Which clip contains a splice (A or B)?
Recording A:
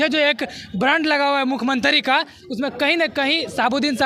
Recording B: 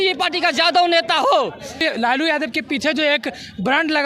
B